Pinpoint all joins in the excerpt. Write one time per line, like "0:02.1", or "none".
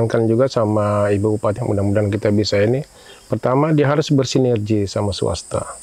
0:01.6